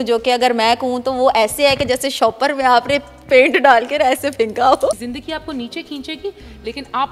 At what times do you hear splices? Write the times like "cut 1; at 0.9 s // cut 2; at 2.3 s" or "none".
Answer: cut 1; at 4.9 s